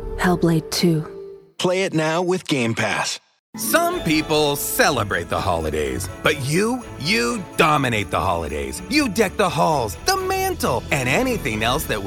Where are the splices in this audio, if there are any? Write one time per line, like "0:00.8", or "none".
0:03.3